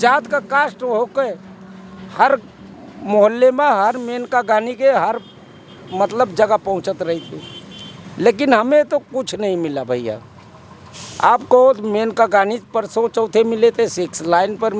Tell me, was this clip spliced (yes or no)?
no